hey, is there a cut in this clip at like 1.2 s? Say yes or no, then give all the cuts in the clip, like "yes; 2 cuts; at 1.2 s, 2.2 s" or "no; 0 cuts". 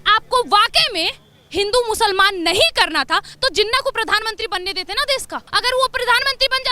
no; 1 cut; at 5.4 s